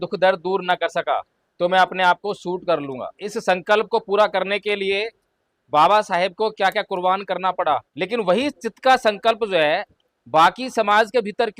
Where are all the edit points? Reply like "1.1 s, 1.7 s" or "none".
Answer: 1.4 s, 3.3 s, 7.9 s